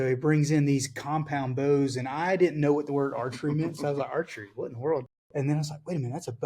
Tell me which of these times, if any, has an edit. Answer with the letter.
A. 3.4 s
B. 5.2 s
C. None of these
B